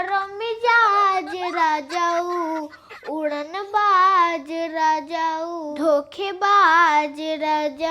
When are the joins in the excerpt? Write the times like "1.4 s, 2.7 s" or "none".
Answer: 5.7 s